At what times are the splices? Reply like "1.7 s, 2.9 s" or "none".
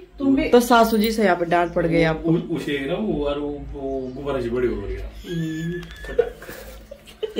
none

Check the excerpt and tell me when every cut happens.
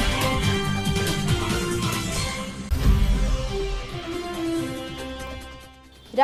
none

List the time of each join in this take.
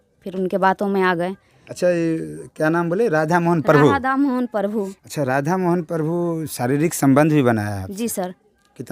none

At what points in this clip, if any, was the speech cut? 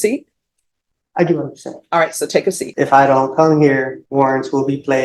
2.6 s, 4.0 s

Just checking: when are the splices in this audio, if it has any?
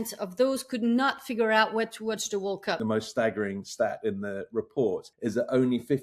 2.8 s, 5.1 s

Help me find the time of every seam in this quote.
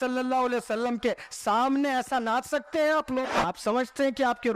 3.4 s

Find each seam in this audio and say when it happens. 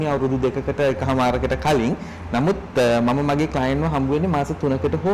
none

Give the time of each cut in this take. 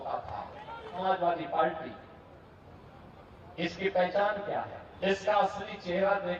1.0 s, 4.8 s

